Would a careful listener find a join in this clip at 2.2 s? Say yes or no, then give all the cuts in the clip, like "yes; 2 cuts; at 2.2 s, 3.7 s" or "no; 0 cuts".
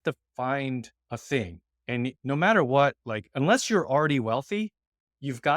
yes; 2 cuts; at 1.0 s, 2.2 s